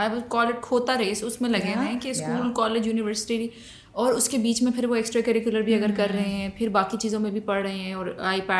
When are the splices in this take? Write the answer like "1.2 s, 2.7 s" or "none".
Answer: none